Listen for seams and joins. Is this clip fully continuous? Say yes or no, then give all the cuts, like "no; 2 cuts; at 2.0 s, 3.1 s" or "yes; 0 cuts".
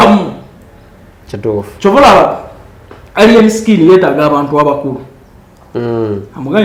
yes; 0 cuts